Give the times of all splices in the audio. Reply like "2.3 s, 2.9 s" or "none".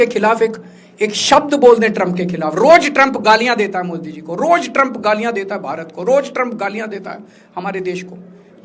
none